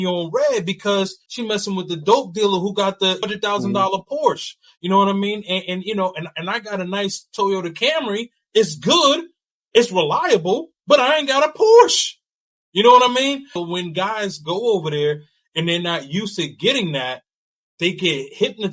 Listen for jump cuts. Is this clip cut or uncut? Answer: cut